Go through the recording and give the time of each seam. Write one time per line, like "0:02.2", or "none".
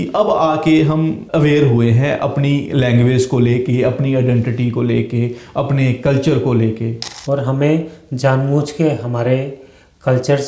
0:01.2
0:07.1